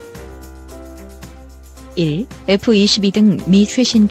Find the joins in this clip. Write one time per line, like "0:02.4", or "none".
0:02.0